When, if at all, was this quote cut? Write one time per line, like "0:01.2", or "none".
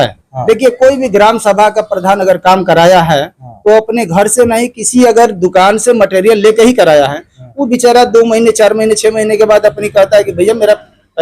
none

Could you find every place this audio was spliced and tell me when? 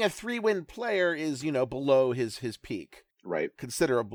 0:03.2

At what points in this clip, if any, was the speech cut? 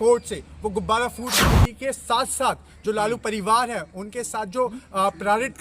0:01.4

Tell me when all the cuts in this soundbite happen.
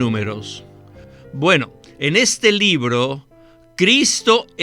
0:01.0
0:03.4

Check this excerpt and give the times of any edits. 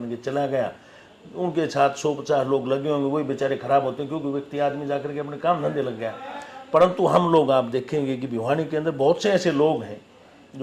none

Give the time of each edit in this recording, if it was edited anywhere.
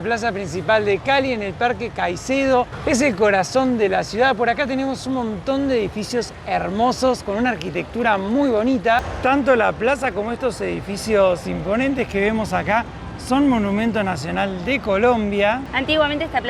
none

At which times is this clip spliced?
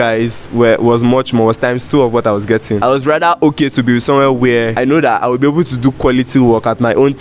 0:02.8
0:04.7

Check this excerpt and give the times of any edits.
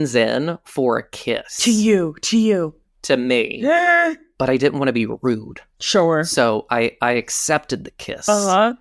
0:04.2

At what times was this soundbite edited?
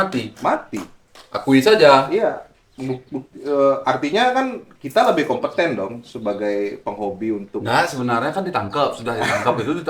none

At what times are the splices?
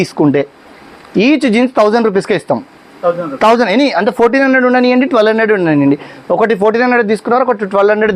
none

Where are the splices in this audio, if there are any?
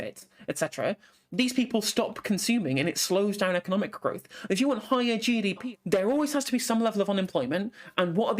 0:05.6

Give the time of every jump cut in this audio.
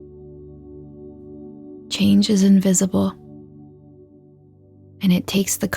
0:01.5

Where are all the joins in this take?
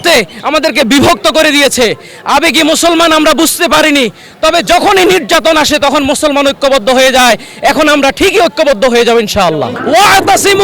0:09.7

